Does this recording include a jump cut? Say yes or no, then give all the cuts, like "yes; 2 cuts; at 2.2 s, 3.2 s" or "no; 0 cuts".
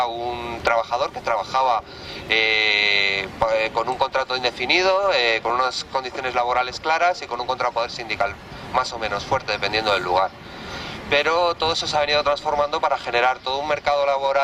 yes; 1 cut; at 5.9 s